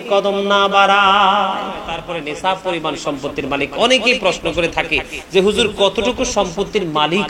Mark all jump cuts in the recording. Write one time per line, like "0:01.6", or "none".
0:02.0

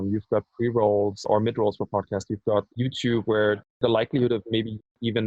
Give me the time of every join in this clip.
0:01.3
0:02.7

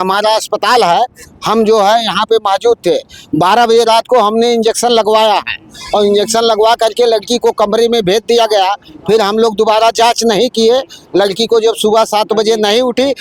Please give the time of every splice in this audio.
none

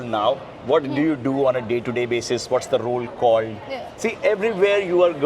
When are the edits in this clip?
0:04.0

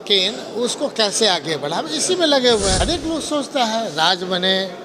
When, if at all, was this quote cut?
0:02.8

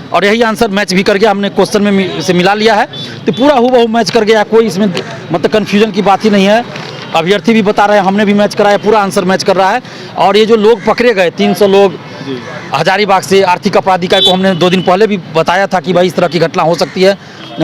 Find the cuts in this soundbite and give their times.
none

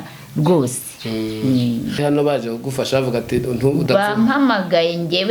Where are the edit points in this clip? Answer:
0:02.0

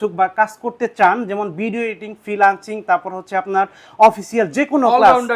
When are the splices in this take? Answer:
none

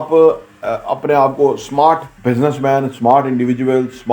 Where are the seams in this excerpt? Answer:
0:02.1

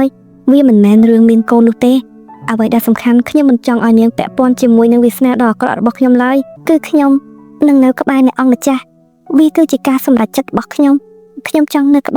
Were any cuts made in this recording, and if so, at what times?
0:06.5

